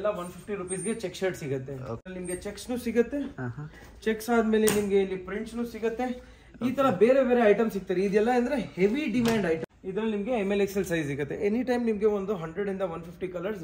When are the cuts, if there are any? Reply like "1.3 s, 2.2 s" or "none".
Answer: 2.0 s, 9.7 s